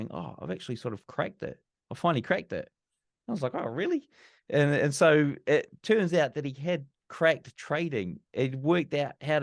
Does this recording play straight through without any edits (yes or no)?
yes